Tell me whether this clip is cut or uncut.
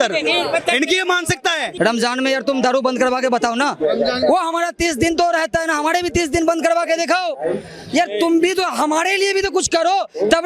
cut